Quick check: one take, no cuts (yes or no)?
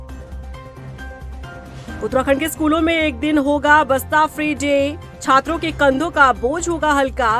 no